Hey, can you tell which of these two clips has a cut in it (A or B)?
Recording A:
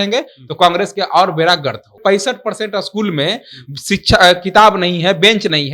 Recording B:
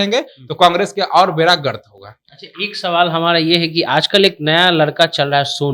A